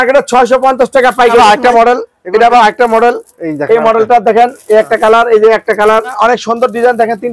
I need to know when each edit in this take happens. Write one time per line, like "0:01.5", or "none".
0:01.4
0:06.1